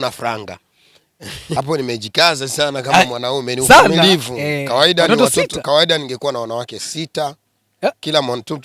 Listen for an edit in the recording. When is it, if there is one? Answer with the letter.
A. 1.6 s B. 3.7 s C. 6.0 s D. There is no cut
A